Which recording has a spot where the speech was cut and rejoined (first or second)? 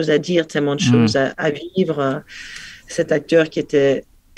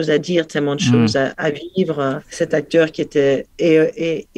second